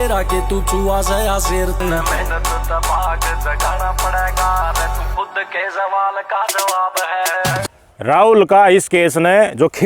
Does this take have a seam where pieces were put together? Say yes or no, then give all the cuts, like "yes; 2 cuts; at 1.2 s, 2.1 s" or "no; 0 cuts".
no; 0 cuts